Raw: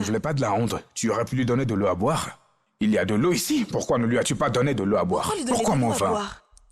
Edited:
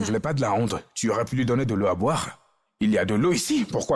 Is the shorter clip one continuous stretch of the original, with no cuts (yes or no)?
yes